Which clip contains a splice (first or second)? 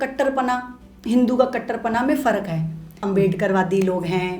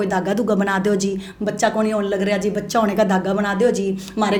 first